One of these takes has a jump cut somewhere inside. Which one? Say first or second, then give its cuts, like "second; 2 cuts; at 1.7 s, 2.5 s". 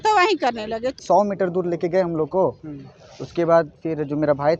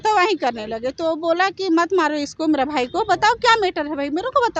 first; 1 cut; at 1.0 s